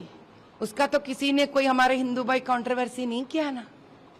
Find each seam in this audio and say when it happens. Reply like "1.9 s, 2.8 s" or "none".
none